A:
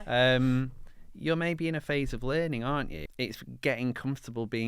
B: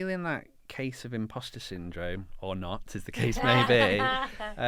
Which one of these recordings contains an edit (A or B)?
A